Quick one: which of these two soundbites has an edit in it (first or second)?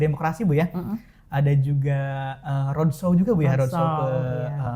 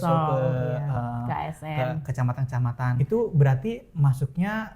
second